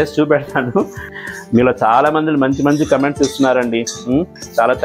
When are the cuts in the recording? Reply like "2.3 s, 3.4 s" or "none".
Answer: 1.0 s